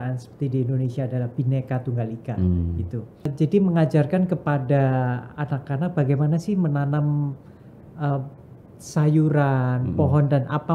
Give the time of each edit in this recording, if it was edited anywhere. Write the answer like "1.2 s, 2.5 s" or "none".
3.3 s